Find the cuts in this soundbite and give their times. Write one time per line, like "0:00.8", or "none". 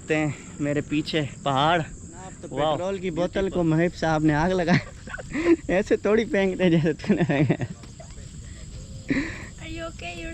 0:02.9